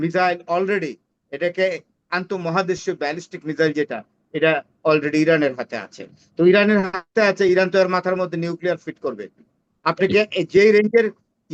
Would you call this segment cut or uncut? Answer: uncut